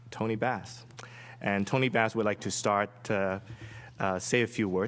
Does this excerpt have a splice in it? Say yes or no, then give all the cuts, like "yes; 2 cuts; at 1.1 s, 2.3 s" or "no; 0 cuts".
yes; 1 cut; at 1.2 s